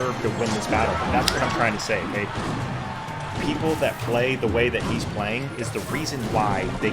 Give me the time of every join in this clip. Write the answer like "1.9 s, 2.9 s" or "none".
none